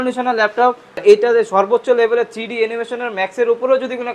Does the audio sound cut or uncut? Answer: cut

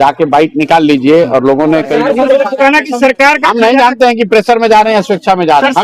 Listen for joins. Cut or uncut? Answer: cut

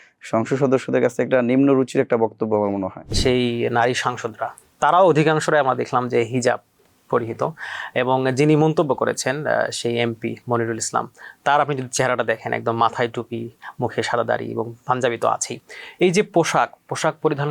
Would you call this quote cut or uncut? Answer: cut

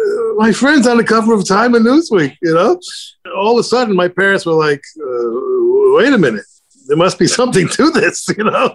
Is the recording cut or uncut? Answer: cut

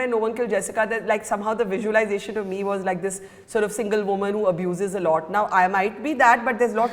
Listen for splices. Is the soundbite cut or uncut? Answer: uncut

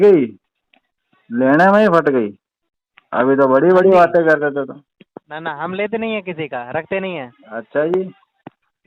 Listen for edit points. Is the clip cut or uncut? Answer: uncut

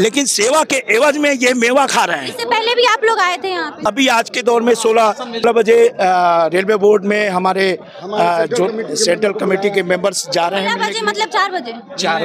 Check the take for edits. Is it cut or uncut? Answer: uncut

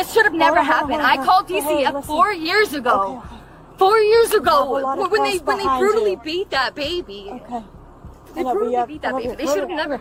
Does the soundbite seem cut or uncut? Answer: uncut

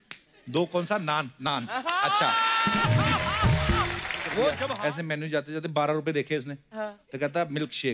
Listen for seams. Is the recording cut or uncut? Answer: cut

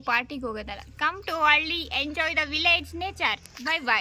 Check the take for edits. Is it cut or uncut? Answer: uncut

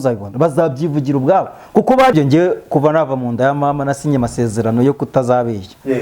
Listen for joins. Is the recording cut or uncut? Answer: cut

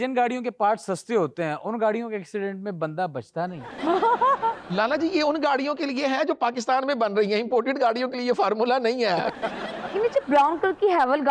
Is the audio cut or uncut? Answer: cut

